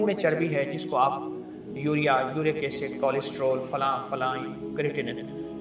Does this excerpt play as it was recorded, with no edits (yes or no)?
yes